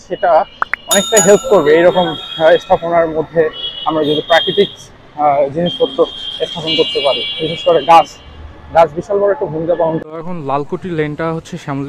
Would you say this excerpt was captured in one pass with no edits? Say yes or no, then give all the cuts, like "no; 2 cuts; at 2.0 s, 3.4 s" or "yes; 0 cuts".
no; 1 cut; at 10.0 s